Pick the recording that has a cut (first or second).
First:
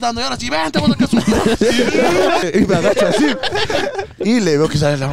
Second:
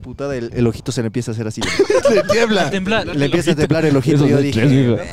first